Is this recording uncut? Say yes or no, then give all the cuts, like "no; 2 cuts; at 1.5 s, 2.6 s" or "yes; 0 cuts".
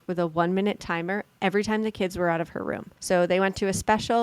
no; 1 cut; at 2.9 s